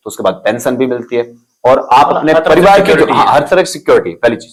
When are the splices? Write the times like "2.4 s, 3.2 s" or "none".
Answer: none